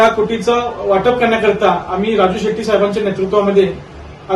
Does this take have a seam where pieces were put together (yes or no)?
no